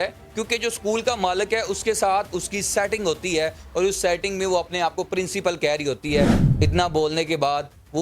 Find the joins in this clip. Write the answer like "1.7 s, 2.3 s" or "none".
6.4 s